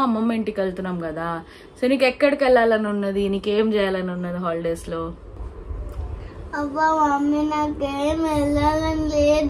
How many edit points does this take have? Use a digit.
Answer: 0